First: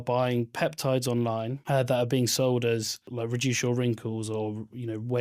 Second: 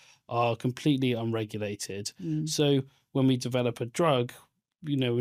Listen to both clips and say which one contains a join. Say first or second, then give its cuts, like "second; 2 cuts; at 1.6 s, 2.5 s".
first; 2 cuts; at 1.6 s, 3.0 s